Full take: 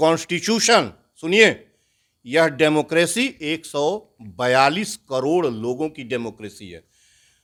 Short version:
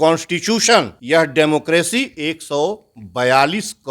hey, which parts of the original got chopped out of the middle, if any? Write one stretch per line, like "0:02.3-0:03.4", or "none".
0:01.0-0:02.2